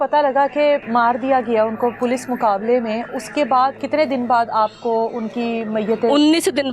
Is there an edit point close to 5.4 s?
no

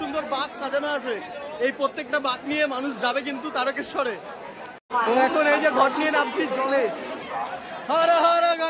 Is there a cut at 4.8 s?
no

